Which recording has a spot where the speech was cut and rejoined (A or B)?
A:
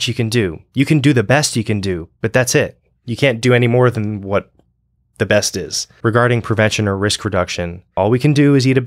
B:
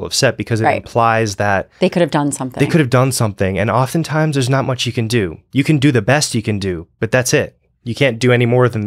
A